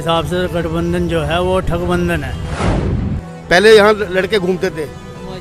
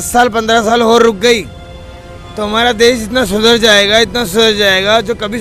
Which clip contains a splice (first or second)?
first